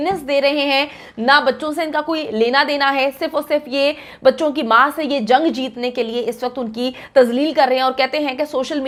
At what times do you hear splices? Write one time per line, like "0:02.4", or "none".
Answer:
none